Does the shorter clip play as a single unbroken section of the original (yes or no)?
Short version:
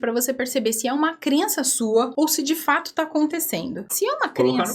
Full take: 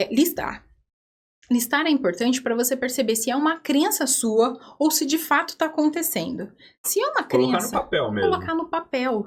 no